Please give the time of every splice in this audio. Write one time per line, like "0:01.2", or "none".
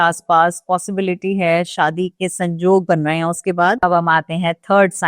0:03.8